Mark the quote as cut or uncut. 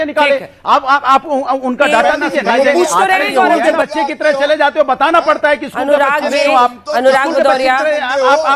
cut